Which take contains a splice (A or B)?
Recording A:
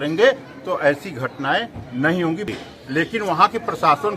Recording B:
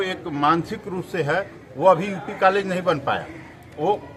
A